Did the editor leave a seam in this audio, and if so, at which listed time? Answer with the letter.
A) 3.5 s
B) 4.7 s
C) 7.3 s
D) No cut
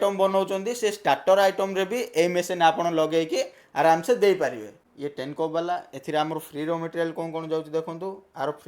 B